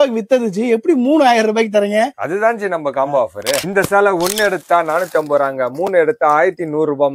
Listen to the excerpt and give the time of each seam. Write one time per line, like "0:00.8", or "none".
0:03.6